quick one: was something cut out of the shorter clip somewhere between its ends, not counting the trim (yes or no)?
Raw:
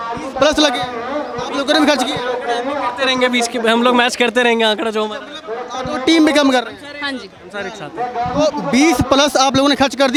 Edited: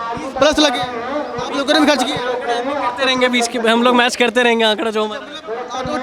no